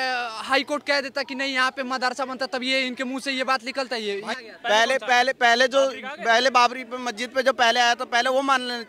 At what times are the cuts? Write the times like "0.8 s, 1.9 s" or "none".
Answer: 4.3 s